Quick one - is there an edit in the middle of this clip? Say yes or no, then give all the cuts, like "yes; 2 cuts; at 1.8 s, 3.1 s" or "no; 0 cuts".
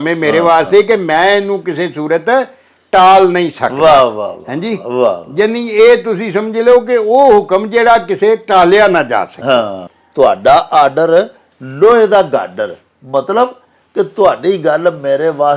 no; 0 cuts